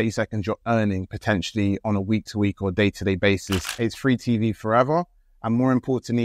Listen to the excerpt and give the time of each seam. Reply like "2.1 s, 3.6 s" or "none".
3.7 s